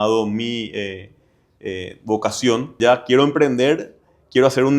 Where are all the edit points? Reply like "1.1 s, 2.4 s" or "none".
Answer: 2.8 s